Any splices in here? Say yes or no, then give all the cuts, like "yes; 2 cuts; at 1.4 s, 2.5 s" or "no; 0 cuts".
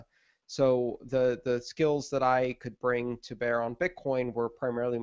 yes; 1 cut; at 1.1 s